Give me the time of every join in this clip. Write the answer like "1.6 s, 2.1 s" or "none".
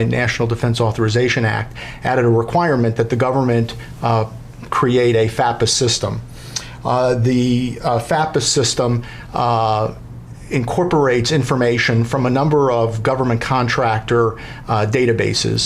6.9 s